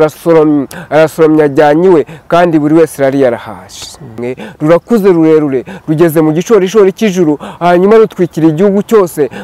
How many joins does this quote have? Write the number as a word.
one